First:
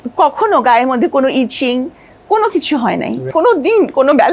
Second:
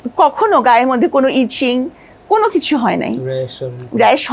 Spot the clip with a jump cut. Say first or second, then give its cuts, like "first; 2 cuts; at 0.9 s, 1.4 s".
first; 1 cut; at 3.3 s